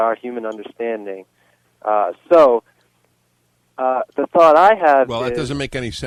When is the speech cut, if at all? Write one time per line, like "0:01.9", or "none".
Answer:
none